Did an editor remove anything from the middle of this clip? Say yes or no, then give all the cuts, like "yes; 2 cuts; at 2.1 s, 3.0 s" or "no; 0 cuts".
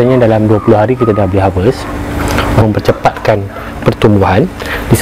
yes; 1 cut; at 2.6 s